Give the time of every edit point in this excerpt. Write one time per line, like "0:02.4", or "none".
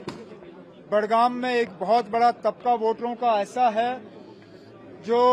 none